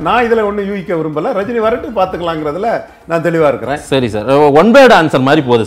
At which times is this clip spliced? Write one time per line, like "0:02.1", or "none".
none